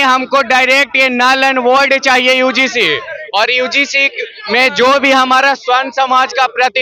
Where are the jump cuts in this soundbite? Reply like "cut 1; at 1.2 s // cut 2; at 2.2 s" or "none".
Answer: none